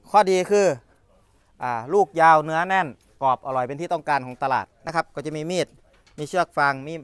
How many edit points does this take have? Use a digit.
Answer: 1